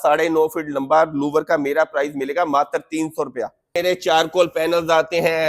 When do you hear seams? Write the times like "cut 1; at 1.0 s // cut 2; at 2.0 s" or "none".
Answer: cut 1; at 3.8 s